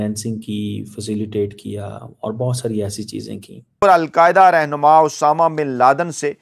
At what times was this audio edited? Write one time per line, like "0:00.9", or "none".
0:03.8